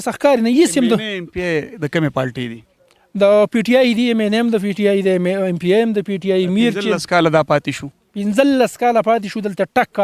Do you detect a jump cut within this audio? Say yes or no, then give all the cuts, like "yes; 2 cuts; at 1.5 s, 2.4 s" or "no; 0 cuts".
no; 0 cuts